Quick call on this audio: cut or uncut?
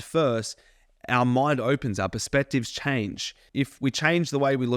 cut